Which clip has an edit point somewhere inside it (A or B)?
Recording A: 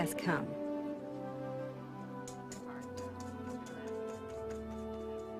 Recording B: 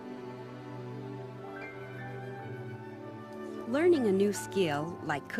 A